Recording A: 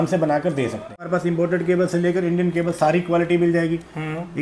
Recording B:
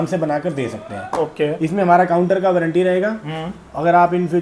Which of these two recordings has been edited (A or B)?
A